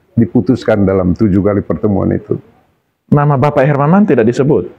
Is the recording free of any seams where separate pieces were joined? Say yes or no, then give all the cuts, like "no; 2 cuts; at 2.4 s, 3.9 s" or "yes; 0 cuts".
yes; 0 cuts